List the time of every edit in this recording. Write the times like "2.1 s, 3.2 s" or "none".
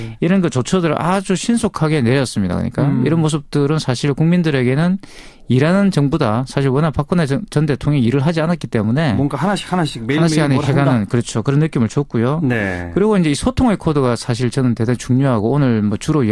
none